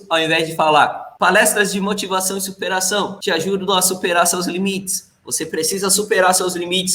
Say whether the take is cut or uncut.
uncut